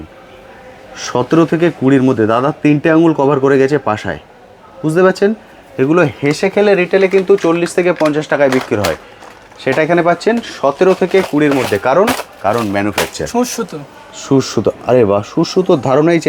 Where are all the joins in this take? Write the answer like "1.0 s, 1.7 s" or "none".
none